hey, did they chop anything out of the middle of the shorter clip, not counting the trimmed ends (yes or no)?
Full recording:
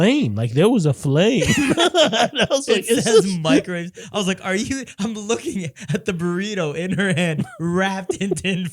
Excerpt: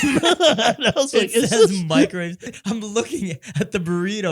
yes